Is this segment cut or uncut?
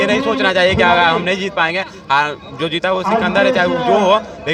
uncut